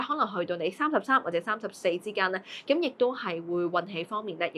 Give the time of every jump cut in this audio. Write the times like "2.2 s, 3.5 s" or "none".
none